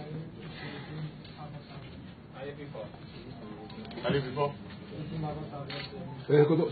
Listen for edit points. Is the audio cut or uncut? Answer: cut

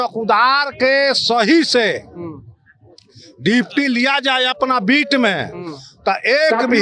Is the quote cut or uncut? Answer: uncut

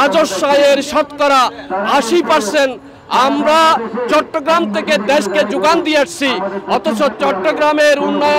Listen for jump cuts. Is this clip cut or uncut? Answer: uncut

